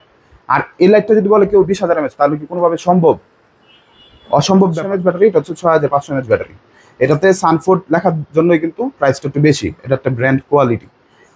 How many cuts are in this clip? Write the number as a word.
one